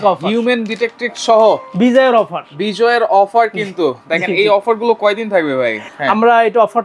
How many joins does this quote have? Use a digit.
1